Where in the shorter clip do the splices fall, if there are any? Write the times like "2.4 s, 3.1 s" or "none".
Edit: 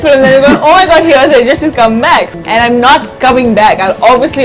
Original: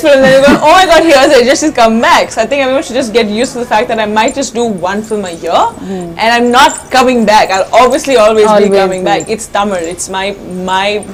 2.3 s